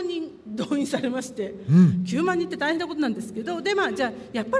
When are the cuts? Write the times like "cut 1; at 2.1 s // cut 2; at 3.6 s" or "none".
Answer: cut 1; at 2.2 s